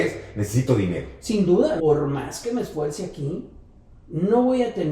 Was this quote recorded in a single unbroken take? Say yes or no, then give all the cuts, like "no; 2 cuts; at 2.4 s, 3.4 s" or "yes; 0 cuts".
no; 1 cut; at 1.8 s